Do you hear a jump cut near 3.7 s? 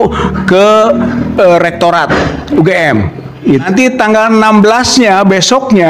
yes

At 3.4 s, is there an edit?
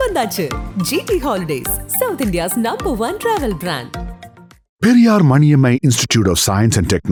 no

